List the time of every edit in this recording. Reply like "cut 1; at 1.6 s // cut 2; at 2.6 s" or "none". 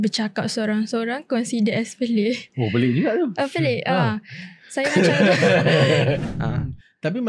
cut 1; at 6.2 s